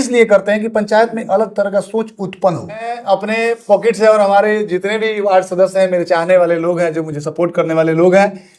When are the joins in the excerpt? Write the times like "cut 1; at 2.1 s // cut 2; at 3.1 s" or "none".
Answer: cut 1; at 2.9 s